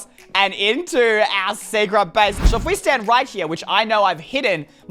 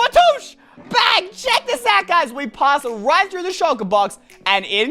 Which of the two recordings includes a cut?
first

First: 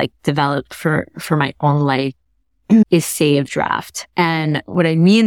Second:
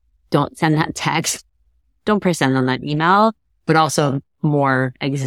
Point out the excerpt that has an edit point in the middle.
first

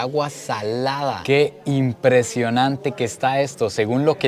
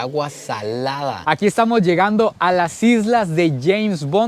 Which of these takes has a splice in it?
second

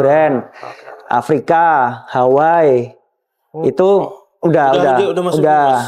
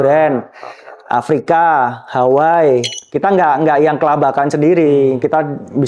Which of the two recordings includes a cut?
second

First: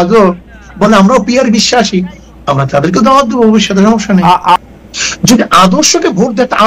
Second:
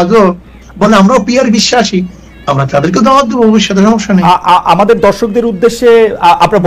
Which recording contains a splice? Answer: first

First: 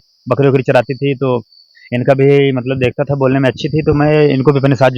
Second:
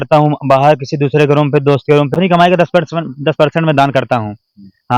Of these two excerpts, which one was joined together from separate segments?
second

